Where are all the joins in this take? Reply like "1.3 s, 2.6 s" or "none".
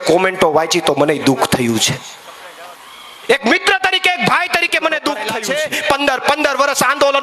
5.3 s